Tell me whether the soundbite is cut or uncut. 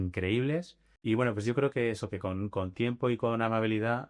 cut